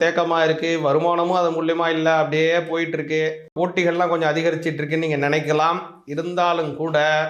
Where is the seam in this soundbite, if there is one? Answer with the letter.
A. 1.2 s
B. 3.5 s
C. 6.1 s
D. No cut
B